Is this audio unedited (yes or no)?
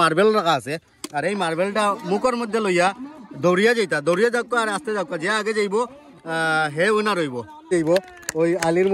no